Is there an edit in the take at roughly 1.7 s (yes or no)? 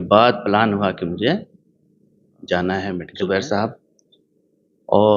no